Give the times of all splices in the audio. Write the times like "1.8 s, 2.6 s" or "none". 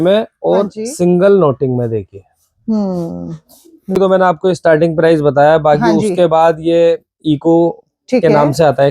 4.0 s